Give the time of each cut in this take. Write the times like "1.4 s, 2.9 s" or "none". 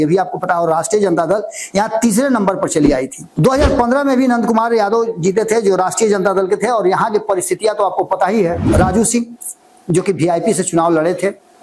3.2 s, 8.6 s